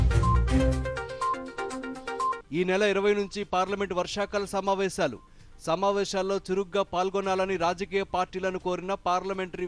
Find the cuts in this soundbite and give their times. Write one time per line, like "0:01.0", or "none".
0:02.4

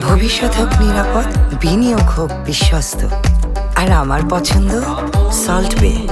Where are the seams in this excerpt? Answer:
none

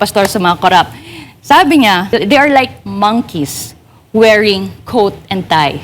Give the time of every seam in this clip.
0:02.1

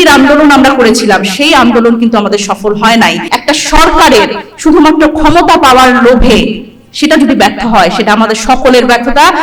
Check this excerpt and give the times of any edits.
0:03.3

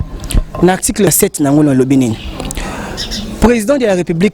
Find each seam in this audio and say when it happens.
0:01.1

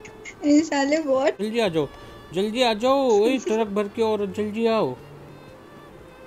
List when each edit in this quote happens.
0:01.4

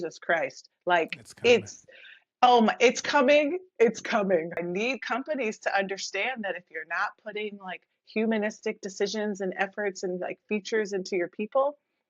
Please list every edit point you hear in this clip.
0:04.6

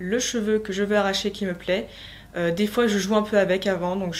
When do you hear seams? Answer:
none

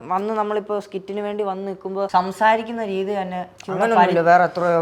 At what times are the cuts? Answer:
0:02.1

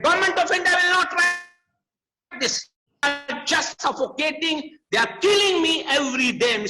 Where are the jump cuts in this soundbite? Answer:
0:03.0

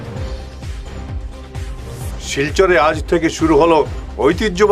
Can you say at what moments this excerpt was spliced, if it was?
0:01.9

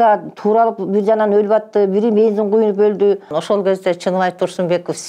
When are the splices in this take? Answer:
0:03.4

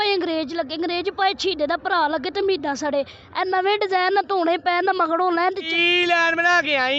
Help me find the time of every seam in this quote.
0:05.7

